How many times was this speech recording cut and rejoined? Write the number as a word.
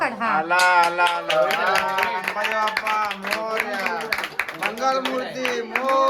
zero